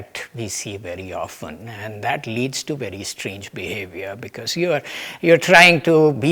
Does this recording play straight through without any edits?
yes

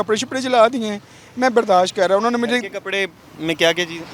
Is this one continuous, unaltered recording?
yes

